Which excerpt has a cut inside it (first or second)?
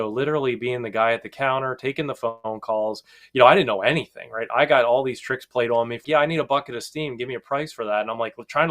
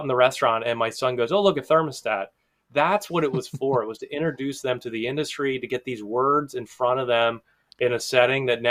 first